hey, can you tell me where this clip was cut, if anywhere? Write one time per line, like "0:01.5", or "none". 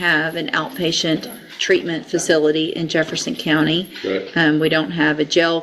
none